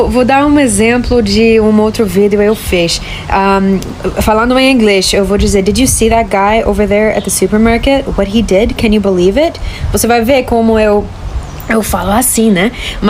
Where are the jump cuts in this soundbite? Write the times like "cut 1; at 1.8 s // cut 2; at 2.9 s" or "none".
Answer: none